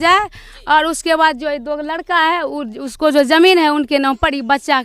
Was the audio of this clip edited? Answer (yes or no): no